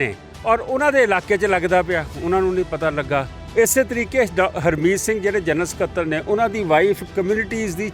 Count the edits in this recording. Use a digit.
1